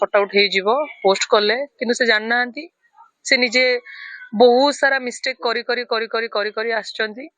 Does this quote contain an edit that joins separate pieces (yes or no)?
no